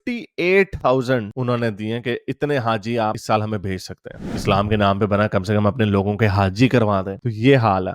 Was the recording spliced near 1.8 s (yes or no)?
no